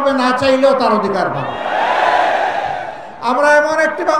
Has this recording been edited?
no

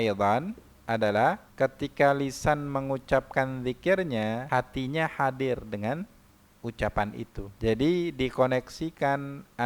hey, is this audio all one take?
no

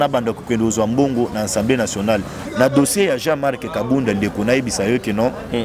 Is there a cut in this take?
yes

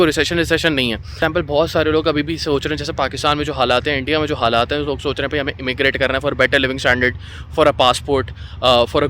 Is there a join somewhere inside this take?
yes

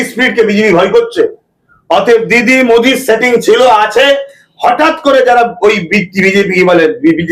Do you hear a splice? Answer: no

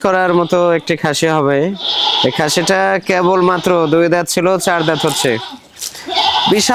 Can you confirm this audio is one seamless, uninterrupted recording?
yes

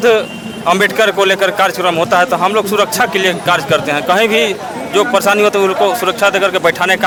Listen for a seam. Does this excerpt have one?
no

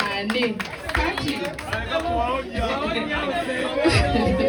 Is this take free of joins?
yes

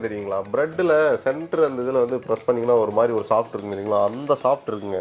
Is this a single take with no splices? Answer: yes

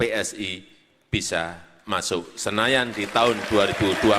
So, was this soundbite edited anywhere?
no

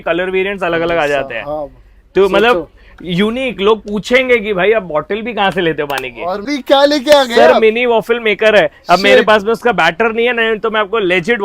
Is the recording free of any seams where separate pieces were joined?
no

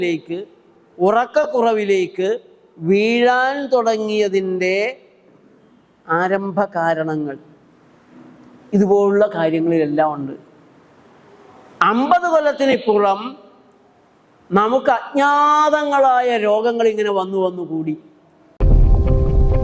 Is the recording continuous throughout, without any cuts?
no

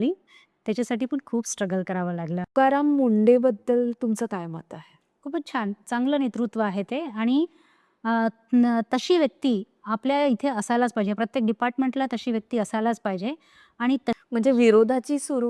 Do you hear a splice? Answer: yes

